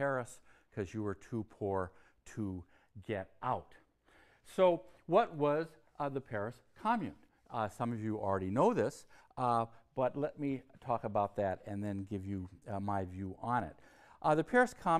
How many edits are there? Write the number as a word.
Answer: one